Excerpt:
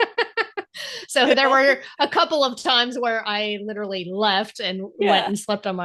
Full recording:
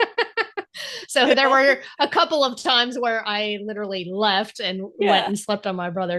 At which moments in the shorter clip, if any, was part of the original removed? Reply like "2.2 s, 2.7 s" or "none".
none

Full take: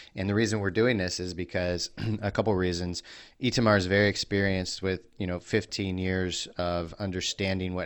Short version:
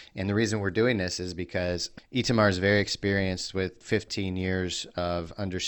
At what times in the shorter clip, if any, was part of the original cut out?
1.9 s, 3.8 s

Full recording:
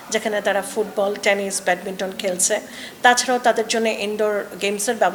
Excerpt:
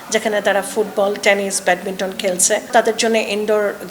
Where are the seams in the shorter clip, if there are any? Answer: 2.7 s

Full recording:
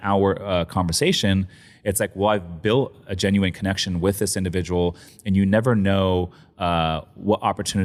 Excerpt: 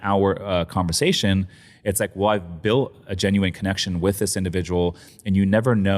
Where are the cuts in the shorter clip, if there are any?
none

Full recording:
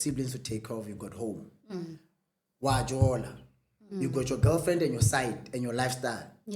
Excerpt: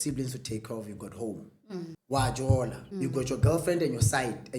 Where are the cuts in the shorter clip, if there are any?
2.0 s, 2.8 s

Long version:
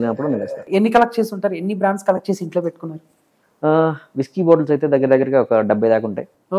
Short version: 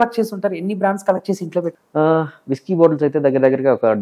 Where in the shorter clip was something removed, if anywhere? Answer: 1.8 s

